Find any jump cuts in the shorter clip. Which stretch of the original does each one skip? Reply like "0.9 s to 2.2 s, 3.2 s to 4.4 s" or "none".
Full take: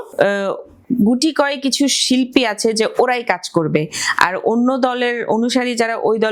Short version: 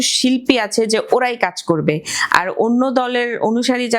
none